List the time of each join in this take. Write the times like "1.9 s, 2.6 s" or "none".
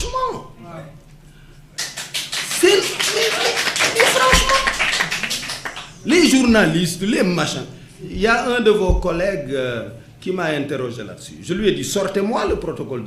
none